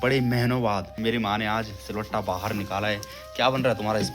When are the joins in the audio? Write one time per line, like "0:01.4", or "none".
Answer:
0:00.9

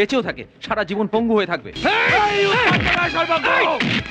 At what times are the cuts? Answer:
0:01.7

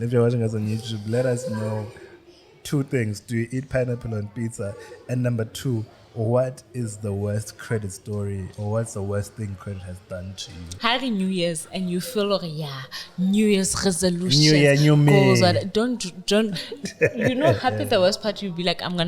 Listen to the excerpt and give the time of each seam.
0:10.7

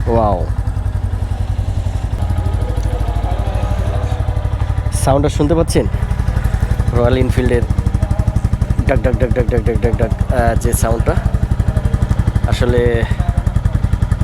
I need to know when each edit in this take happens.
0:02.2

